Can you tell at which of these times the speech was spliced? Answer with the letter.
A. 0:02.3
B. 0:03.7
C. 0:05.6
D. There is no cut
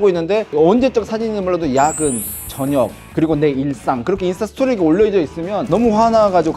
C